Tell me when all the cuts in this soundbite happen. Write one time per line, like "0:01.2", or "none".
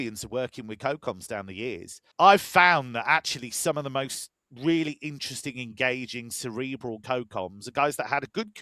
0:02.0